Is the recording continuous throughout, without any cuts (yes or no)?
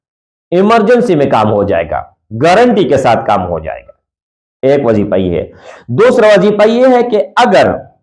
yes